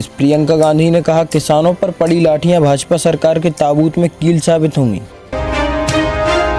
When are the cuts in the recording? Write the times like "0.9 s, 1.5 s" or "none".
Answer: 5.0 s

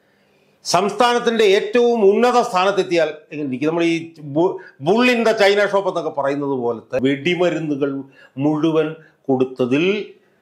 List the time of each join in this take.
7.0 s

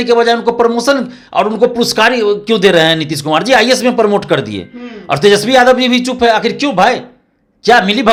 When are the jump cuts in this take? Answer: none

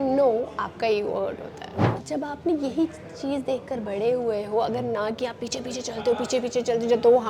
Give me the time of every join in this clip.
1.9 s

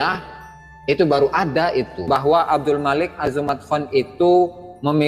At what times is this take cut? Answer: 2.0 s

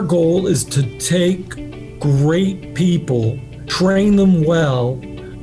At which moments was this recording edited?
1.0 s

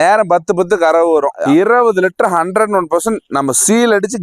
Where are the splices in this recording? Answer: 1.3 s

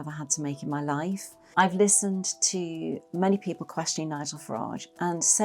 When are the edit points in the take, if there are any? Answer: 1.4 s

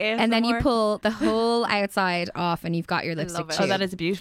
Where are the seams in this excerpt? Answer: 1.0 s

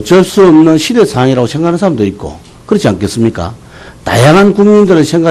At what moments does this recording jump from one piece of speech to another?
0.9 s

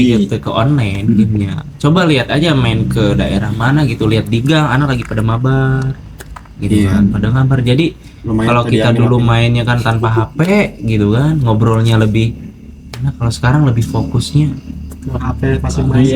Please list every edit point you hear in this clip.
none

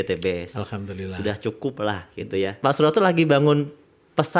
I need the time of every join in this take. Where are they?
2.6 s

